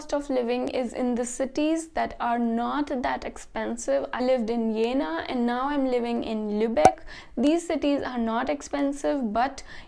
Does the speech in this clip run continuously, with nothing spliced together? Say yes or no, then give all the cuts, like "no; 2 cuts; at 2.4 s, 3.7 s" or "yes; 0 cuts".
no; 1 cut; at 4.2 s